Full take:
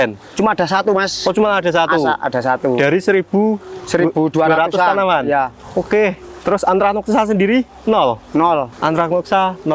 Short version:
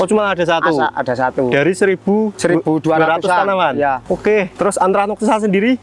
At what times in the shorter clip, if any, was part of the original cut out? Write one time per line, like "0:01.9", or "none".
0:02.3
0:04.2

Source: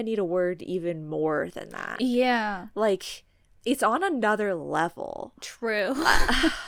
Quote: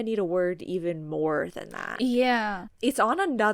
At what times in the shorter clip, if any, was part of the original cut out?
0:02.6

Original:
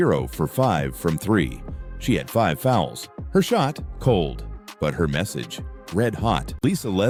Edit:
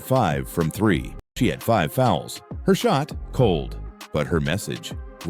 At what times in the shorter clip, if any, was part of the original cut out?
0:01.2

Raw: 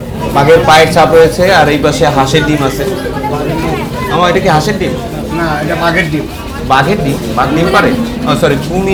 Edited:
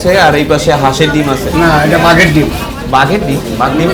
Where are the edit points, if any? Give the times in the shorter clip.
0:01.5

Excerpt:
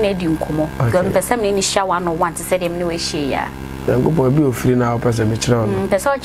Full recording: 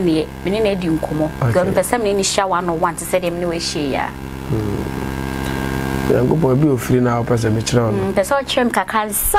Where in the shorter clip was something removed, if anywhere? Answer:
0:03.9

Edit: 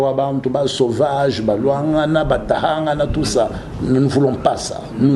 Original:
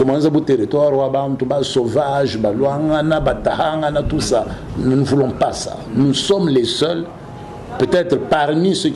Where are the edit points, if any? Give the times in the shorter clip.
none

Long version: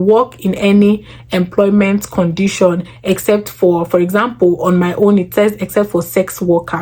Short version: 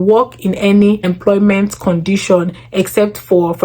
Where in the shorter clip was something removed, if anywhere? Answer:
0:01.1

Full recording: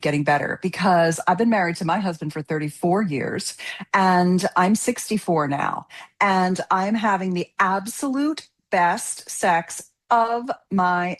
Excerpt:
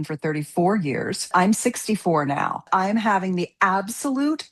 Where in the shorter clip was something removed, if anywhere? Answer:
0:01.3
0:02.6

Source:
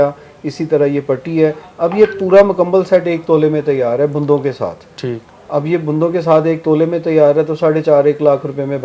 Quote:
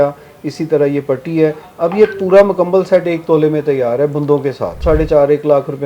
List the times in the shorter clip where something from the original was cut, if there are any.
0:04.8

